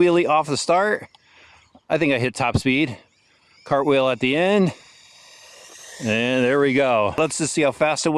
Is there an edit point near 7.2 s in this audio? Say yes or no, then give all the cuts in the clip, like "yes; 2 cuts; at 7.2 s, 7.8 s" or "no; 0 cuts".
yes; 1 cut; at 7.2 s